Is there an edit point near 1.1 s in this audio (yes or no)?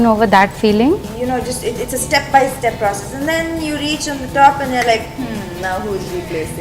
yes